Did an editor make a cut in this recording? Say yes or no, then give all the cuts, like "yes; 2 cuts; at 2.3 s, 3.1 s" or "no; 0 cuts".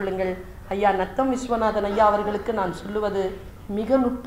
no; 0 cuts